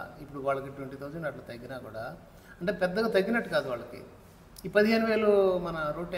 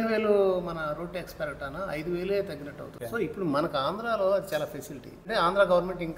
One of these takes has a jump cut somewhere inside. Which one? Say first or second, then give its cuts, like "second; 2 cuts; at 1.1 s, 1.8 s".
second; 2 cuts; at 3.0 s, 5.2 s